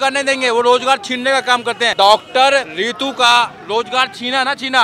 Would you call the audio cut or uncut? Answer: cut